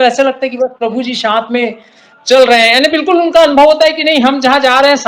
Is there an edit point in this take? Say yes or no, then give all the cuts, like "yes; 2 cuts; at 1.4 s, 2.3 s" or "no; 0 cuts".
no; 0 cuts